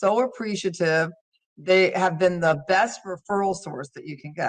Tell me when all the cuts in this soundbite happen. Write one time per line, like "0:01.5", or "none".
none